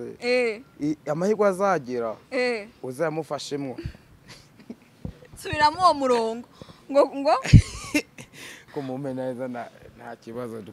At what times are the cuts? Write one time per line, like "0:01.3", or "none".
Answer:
0:08.6